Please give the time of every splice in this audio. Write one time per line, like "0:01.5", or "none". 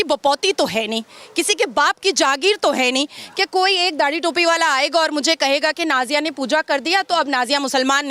none